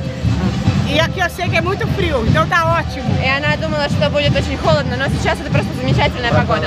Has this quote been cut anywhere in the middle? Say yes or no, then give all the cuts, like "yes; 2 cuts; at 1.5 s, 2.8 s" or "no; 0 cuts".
no; 0 cuts